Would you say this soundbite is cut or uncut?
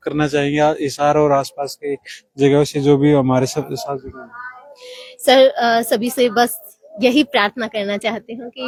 uncut